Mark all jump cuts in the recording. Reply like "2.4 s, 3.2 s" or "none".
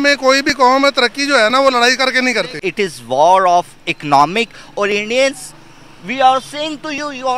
2.6 s